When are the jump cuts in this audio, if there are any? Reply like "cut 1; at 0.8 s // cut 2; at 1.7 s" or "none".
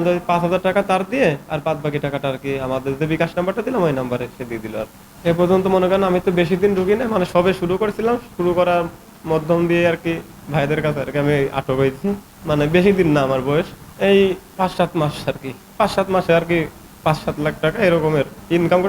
none